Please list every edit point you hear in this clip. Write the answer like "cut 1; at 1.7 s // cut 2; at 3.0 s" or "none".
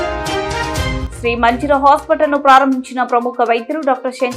cut 1; at 1.0 s

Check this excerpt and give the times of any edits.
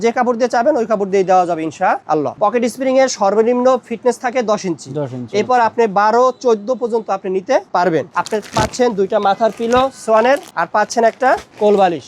cut 1; at 2.3 s // cut 2; at 8.1 s // cut 3; at 10.5 s

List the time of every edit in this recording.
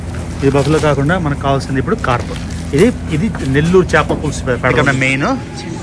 cut 1; at 4.7 s

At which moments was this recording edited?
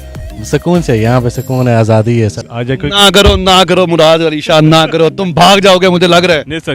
cut 1; at 2.4 s

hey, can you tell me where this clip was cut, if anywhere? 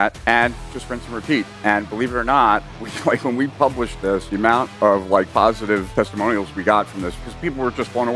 cut 1; at 7.2 s

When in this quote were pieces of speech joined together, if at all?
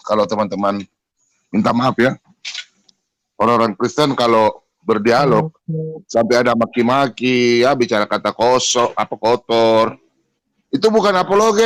none

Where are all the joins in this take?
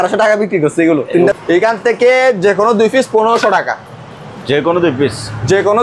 cut 1; at 1.3 s

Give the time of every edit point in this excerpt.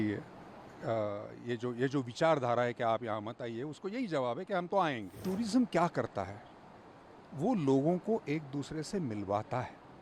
cut 1; at 5.2 s

